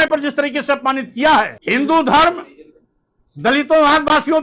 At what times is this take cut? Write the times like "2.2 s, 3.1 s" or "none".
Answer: 1.6 s